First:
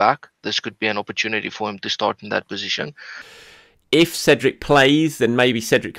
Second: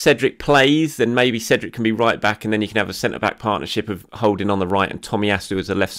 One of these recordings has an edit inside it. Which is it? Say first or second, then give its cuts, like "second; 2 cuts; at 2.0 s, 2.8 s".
first; 1 cut; at 3.3 s